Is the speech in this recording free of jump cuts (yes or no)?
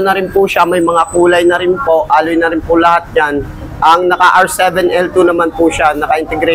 yes